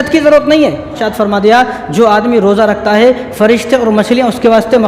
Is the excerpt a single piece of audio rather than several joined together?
no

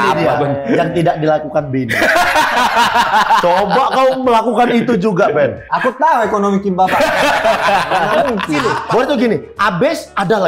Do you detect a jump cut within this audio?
yes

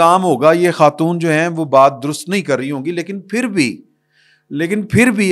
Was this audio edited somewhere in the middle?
no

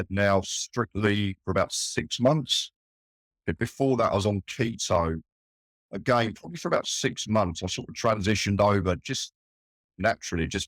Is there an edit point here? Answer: no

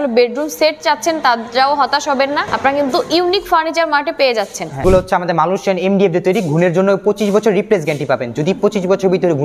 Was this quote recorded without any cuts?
no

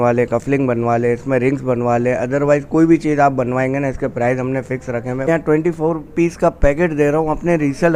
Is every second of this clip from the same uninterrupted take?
no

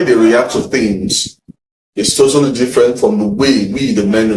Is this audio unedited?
yes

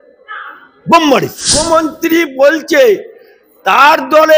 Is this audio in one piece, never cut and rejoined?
no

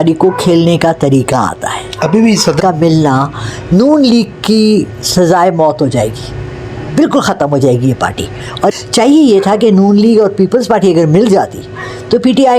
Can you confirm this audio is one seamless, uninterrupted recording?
no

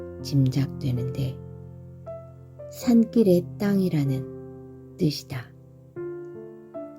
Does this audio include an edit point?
yes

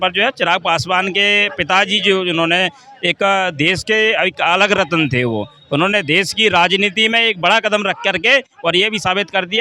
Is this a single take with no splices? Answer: yes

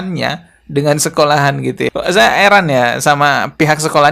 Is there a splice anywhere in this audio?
no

